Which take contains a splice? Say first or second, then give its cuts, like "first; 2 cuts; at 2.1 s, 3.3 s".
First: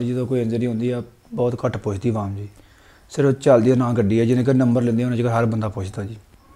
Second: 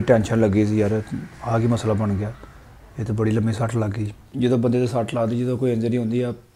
second; 1 cut; at 4.3 s